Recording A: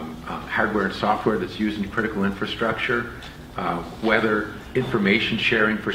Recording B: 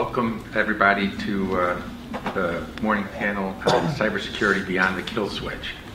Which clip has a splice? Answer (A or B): A